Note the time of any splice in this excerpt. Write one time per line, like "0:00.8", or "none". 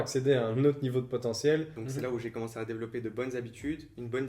0:01.8

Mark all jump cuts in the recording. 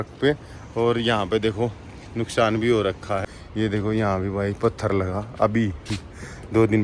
0:03.4

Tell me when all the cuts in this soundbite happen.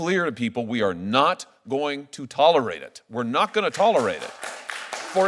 none

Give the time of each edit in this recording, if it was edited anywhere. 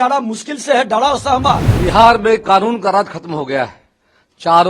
0:01.7

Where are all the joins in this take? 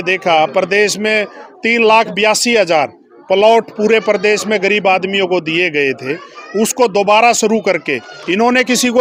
none

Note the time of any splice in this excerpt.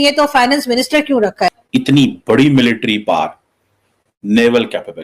0:01.6

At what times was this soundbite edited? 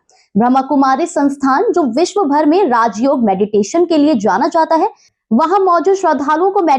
0:05.1

